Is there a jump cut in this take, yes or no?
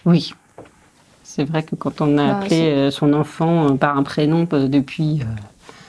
yes